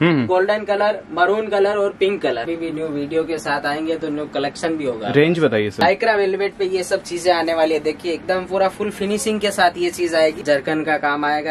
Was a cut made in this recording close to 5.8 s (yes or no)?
yes